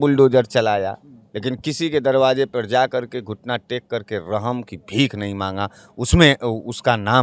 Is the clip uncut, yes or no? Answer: yes